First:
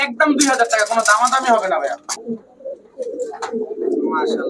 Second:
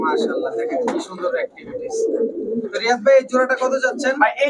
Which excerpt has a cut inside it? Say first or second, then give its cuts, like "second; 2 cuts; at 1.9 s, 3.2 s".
first; 1 cut; at 2.1 s